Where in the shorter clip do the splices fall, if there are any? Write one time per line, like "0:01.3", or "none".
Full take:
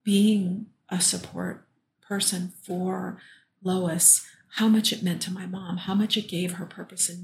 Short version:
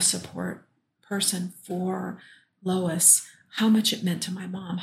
none